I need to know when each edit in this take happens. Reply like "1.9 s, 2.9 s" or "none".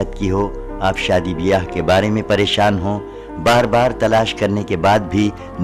none

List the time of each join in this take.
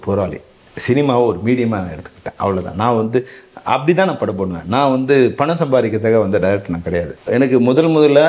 7.1 s

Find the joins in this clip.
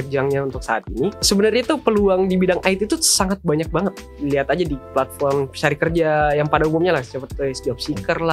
1.3 s, 4.1 s, 4.9 s

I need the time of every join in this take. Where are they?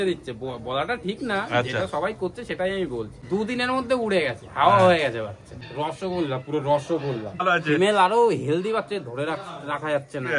3.2 s, 5.6 s, 7.4 s

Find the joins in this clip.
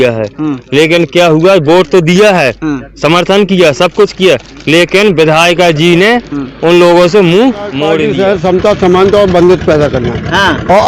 8.0 s

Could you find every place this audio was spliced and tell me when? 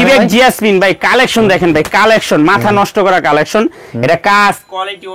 none

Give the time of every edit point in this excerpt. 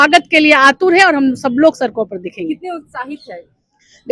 none

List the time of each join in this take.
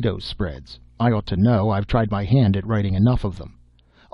1.9 s

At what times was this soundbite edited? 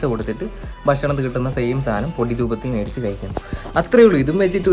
none

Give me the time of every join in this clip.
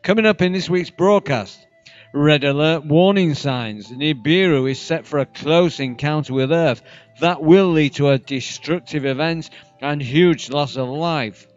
4.4 s

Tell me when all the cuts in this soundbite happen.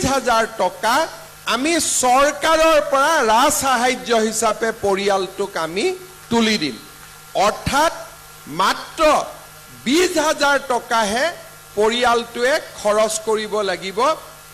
none

